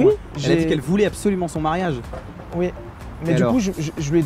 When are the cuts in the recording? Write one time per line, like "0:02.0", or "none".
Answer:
none